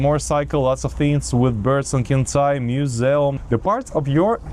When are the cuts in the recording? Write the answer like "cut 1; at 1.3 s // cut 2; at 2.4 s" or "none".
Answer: cut 1; at 3.4 s